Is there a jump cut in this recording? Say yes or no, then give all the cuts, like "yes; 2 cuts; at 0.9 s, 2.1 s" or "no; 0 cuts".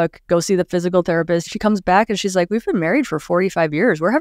yes; 1 cut; at 1.5 s